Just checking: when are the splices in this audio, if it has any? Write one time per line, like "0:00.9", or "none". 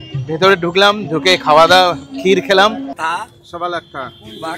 0:02.9